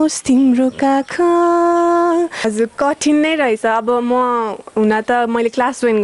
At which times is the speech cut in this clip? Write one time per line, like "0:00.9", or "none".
0:02.4